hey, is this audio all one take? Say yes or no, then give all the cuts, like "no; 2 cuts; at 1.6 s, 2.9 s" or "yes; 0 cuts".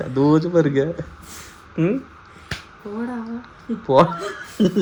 yes; 0 cuts